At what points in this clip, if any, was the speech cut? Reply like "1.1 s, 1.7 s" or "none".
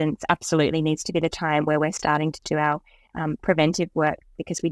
none